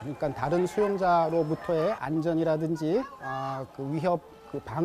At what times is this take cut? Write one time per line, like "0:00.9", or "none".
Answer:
0:03.4